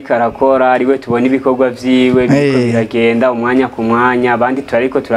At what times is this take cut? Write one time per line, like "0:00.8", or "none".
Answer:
none

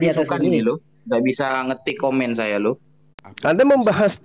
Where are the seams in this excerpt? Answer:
0:02.9

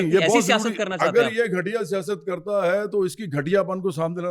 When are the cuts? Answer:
none

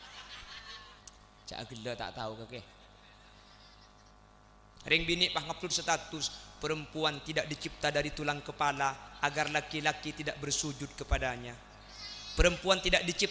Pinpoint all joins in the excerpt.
0:04.7

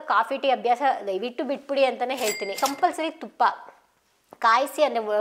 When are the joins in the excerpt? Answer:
0:02.6

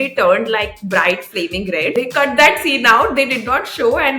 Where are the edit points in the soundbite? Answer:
0:01.9

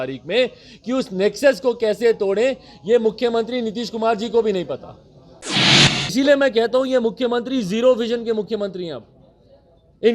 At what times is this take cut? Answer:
0:05.5

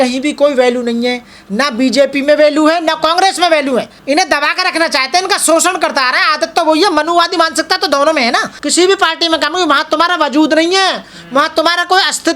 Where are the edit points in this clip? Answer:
0:03.9
0:08.6

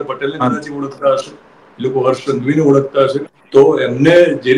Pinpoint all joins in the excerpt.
0:03.3

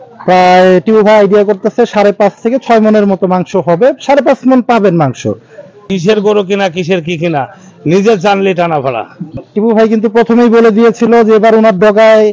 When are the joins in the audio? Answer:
0:05.9
0:09.4

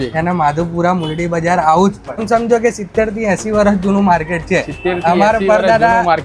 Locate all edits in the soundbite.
0:02.2

